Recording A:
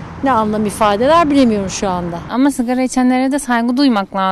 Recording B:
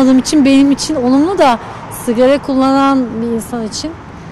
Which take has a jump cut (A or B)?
A